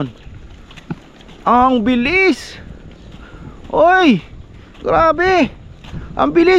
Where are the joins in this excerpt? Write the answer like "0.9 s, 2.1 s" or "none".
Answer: none